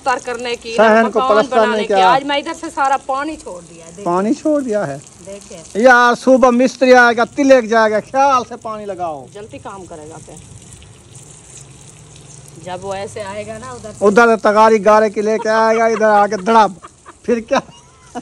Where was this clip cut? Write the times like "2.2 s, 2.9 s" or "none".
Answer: none